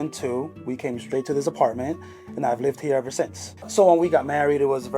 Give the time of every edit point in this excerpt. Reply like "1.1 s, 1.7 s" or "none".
3.6 s